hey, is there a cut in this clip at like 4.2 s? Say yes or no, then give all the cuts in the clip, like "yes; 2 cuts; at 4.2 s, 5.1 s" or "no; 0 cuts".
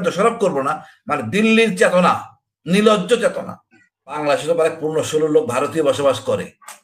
yes; 1 cut; at 4.2 s